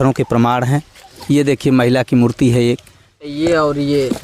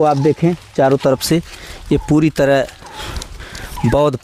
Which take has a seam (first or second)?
first